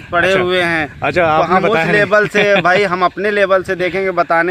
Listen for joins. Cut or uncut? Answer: uncut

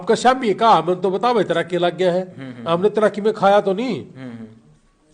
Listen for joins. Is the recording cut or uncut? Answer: uncut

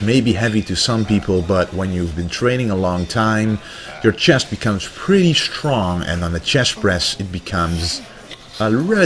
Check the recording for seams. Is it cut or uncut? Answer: uncut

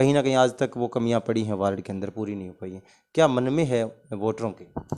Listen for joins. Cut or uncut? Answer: uncut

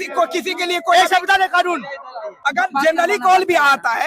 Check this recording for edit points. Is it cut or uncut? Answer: cut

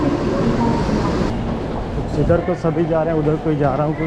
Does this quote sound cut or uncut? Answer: uncut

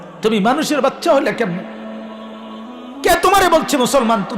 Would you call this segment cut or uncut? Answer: cut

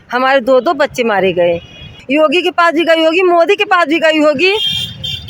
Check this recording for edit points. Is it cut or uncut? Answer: cut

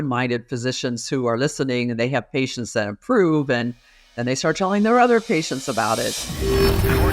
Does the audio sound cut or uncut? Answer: cut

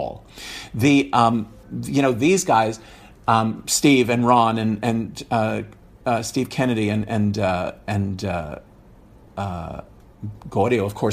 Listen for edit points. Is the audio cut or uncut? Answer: uncut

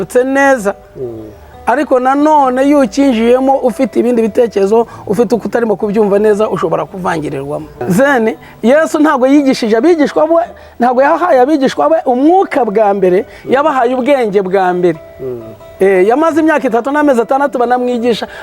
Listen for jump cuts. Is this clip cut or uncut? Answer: cut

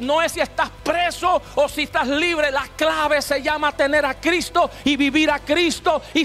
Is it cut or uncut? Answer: uncut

